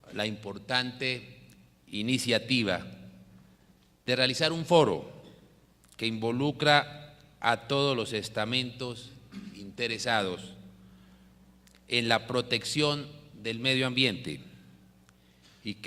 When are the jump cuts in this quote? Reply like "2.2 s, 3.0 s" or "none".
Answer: none

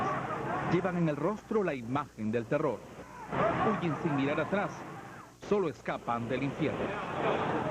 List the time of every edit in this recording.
3.5 s

